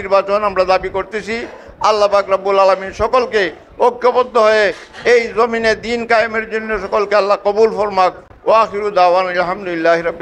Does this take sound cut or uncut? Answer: uncut